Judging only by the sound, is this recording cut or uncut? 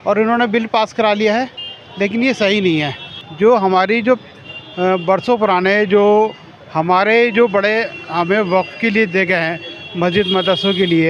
uncut